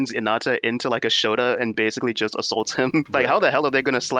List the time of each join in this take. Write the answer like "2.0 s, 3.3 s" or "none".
1.7 s, 3.1 s